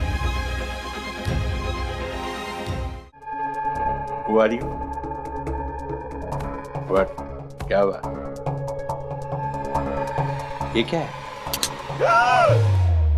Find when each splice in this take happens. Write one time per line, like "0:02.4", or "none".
0:03.3